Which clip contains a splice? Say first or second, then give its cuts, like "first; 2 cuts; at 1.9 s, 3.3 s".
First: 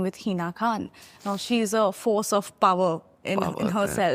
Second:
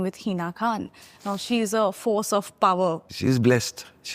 second; 1 cut; at 3.1 s